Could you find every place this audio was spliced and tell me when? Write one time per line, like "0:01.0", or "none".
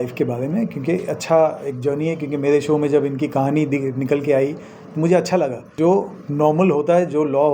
0:05.6